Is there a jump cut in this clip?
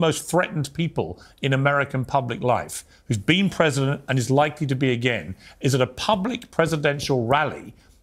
no; 0 cuts

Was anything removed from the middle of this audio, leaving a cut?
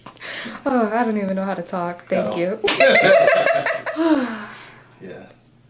yes; 1 cut; at 3.7 s

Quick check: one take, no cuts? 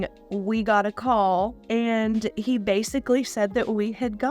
no; 1 cut; at 1.6 s

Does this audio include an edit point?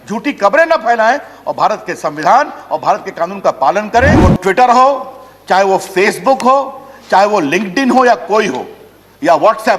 yes; 1 cut; at 4.2 s

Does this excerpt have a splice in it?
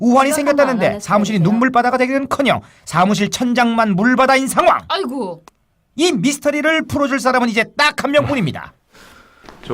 yes; 1 cut; at 2.0 s

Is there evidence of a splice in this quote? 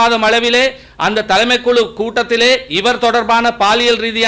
no; 0 cuts

